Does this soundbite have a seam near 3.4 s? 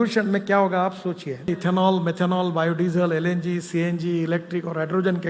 no; 1 cut; at 1.5 s

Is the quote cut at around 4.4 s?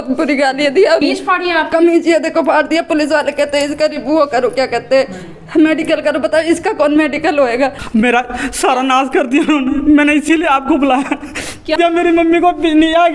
no; 3 cuts; at 1.0 s, 7.8 s, 11.8 s

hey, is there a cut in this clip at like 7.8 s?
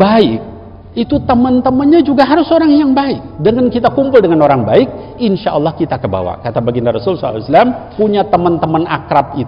yes; 2 cuts; at 3.2 s, 7.8 s

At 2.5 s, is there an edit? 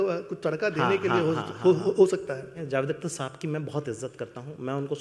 yes; 1 cut; at 2.5 s

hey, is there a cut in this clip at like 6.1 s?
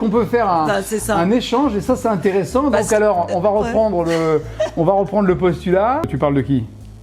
yes; 1 cut; at 6.1 s

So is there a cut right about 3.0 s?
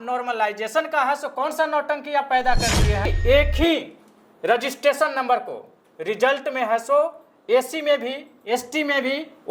yes; 1 cut; at 3.0 s

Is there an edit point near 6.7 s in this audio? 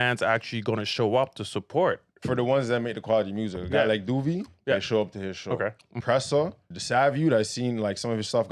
yes; 2 cuts; at 5.9 s, 6.7 s

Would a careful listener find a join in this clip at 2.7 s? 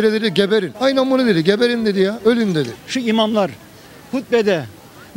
yes; 1 cut; at 2.7 s

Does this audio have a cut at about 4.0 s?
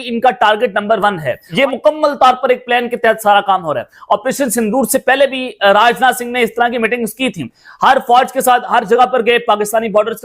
no; 1 cut; at 1.5 s

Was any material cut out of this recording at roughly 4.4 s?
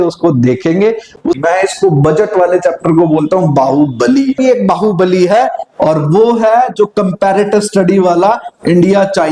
yes; 2 cuts; at 1.4 s, 4.4 s

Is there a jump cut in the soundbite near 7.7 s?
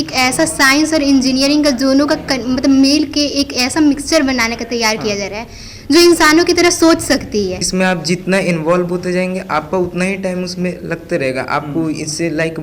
yes; 1 cut; at 7.7 s

